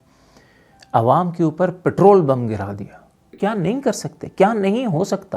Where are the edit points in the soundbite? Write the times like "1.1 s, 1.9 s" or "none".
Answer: 3.2 s